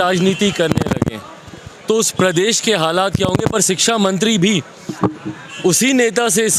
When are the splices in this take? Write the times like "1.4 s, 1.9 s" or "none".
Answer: none

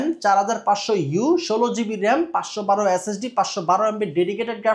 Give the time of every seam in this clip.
none

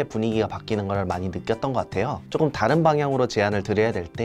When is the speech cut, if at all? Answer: 2.2 s

